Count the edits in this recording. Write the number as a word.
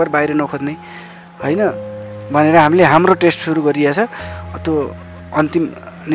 zero